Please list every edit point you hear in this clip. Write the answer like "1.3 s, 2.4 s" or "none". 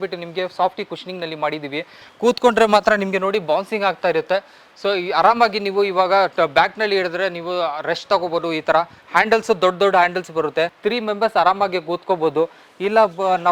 2.0 s, 10.7 s